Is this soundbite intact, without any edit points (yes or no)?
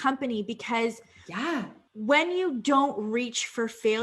no